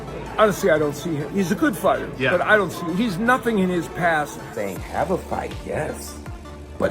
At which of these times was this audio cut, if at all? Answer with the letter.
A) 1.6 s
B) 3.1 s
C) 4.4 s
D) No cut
C